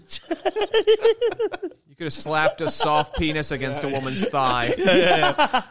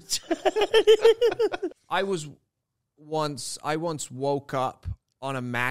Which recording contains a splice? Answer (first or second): second